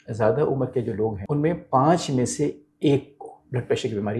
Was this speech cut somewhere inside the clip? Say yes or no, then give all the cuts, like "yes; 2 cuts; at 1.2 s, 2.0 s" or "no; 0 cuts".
yes; 1 cut; at 1.2 s